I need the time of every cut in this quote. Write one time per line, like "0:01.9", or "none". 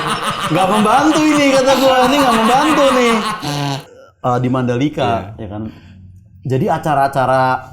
0:03.8